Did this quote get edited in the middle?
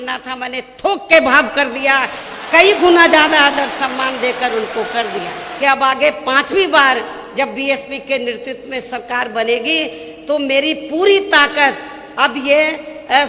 yes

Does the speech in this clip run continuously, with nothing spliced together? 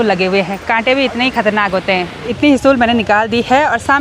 no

